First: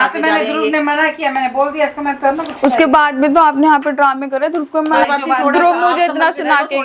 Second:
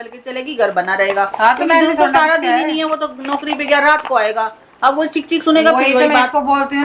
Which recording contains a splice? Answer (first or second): first